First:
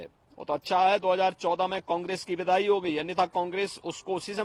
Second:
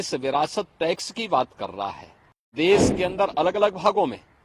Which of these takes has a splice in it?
second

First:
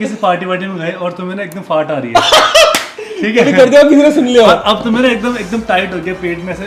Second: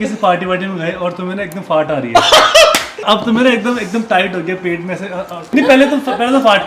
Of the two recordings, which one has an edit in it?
second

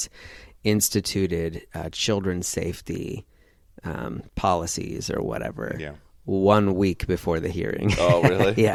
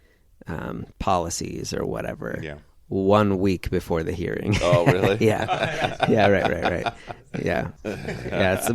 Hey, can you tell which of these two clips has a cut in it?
second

